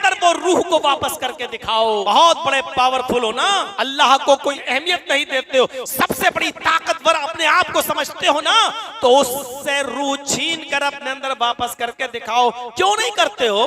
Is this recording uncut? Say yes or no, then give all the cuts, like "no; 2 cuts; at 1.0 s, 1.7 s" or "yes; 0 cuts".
no; 3 cuts; at 2.0 s, 3.7 s, 4.6 s